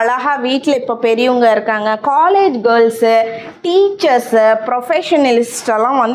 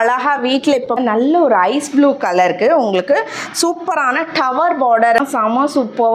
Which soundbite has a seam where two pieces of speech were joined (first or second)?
second